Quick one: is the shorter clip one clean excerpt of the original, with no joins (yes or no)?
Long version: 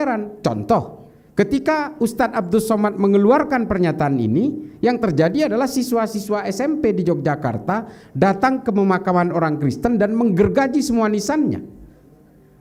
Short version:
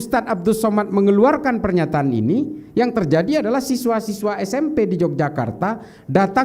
yes